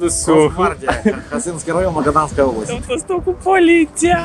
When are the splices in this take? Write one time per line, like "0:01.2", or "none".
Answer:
0:02.8